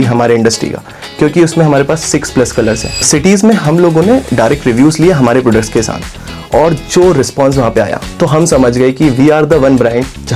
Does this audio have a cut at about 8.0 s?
yes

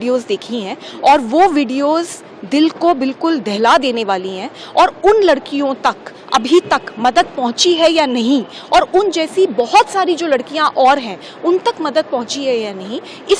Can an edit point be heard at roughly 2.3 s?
no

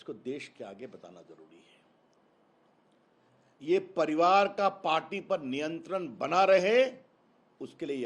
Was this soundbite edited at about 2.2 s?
yes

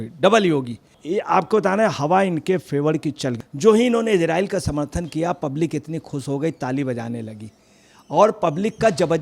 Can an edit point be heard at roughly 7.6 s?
no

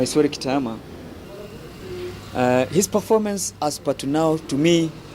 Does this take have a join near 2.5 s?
no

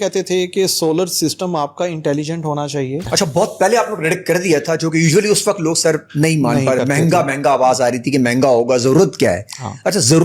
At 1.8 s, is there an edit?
no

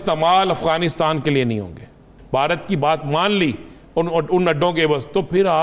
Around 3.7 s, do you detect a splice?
no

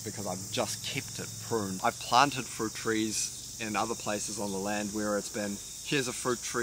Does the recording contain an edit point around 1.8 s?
yes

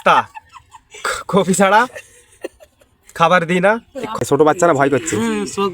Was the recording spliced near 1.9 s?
no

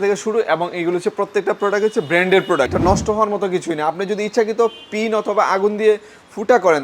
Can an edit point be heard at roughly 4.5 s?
no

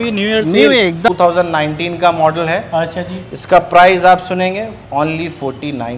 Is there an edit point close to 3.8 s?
no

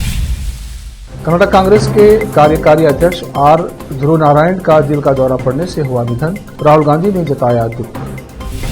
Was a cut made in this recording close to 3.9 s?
no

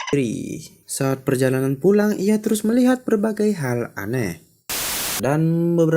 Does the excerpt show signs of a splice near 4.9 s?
yes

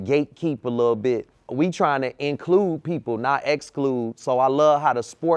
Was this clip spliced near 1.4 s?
yes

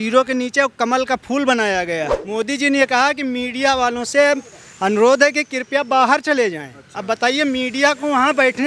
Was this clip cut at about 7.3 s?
no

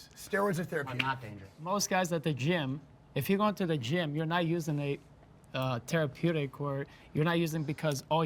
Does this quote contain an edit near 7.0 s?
no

